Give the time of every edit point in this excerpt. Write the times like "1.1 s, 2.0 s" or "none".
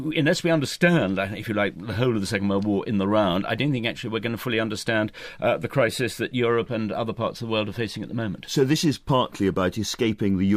none